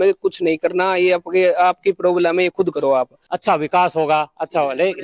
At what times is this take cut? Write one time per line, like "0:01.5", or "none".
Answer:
0:03.2

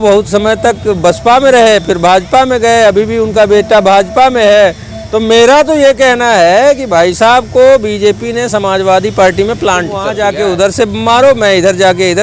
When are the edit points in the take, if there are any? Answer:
0:10.0

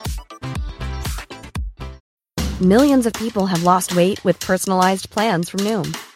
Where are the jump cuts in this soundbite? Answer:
0:02.1

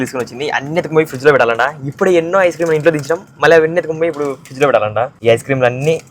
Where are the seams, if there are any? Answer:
0:05.1

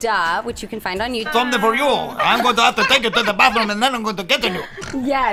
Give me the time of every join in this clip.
none

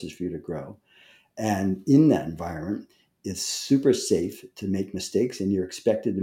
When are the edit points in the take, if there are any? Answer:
none

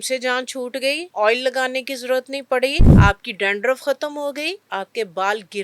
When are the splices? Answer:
0:01.0
0:02.8
0:04.6

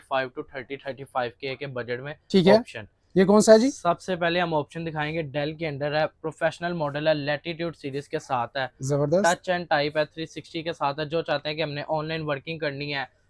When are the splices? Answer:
none

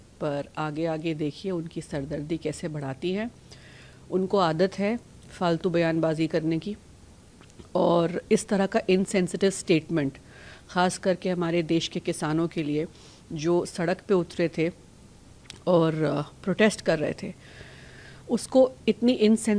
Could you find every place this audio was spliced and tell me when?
none

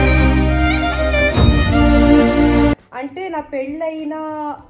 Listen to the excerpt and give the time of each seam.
0:02.7

